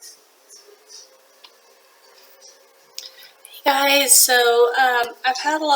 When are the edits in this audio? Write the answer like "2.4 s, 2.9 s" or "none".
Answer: 1.2 s